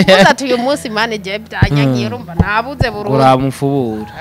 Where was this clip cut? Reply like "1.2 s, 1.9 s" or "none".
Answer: none